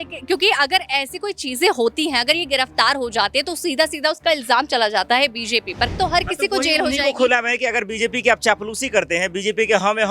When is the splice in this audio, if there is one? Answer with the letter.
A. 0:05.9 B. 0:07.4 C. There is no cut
A